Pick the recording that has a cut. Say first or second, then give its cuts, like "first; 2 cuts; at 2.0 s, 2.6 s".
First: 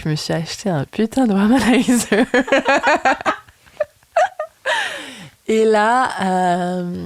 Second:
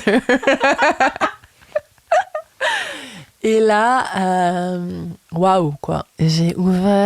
second; 1 cut; at 6.1 s